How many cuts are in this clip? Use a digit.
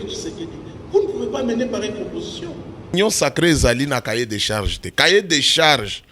1